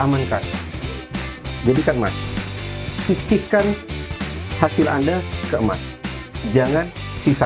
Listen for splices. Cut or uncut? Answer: cut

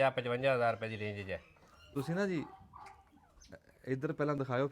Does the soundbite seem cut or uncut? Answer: cut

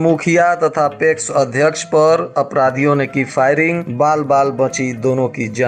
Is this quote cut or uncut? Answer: uncut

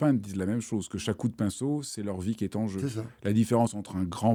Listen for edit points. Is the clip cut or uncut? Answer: uncut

